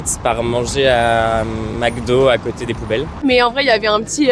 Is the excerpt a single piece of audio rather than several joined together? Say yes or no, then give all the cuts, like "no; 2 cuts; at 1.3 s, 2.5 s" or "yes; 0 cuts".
no; 1 cut; at 3.2 s